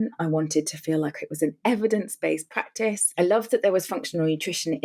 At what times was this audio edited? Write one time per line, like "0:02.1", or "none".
0:03.0

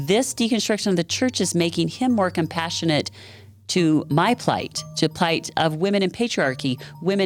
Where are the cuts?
none

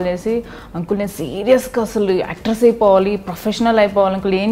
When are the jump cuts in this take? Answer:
none

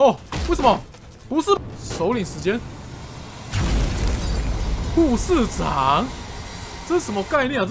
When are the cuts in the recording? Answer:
0:01.6

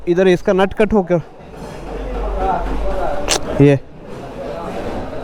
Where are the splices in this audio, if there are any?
none

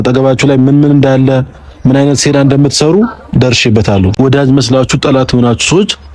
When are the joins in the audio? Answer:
0:04.1

